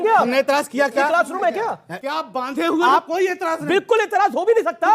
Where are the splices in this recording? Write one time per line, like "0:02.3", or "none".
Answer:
0:02.0